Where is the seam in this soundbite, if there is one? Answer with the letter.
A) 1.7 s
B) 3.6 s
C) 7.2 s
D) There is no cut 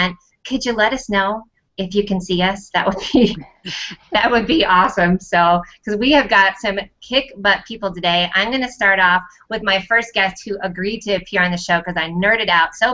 D